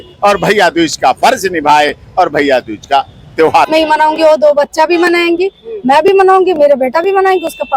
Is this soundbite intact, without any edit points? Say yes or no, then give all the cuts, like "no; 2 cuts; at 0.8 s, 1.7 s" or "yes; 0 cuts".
no; 1 cut; at 3.7 s